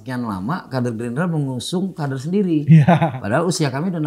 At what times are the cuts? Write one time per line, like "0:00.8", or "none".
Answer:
none